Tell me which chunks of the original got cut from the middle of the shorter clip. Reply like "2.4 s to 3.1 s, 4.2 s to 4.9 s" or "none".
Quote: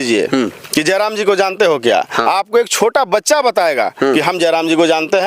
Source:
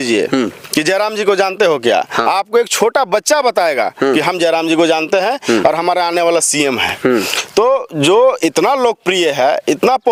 none